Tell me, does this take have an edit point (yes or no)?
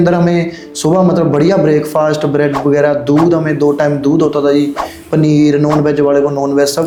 no